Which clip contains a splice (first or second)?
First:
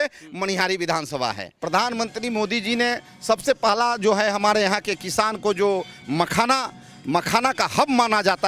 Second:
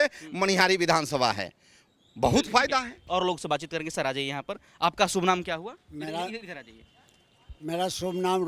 first